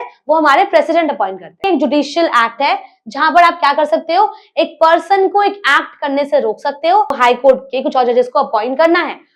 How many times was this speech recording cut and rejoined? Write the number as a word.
two